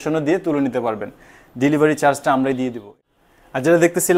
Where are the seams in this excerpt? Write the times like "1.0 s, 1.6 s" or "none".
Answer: none